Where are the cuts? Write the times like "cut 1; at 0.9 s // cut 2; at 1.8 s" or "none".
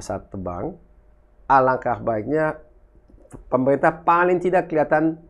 none